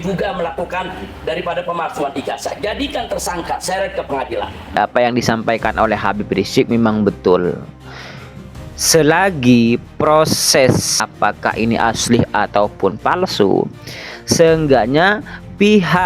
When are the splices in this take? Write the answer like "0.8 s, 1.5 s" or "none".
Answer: 4.8 s, 11.0 s

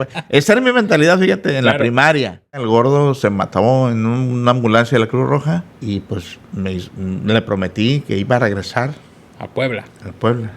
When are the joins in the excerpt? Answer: 2.6 s, 5.7 s

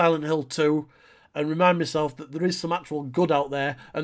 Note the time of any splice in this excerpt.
none

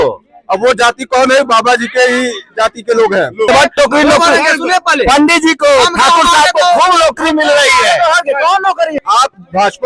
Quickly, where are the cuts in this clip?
3.5 s, 8.9 s

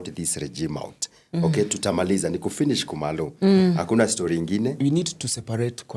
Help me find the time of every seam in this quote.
4.8 s

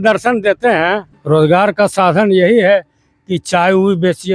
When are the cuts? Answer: 1.1 s

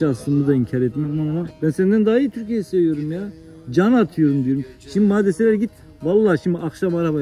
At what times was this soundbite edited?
1.5 s

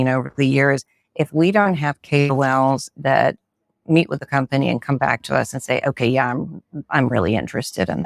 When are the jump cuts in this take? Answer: none

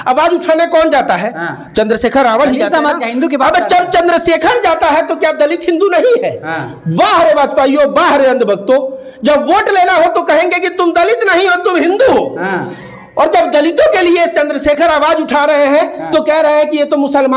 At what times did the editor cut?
none

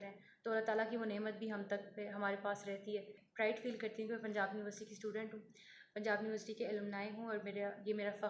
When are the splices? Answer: 3.2 s

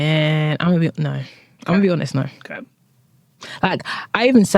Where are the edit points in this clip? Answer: none

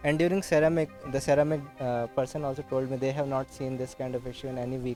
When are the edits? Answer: none

